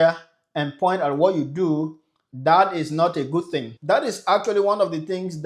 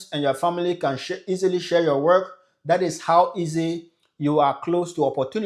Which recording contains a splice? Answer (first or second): first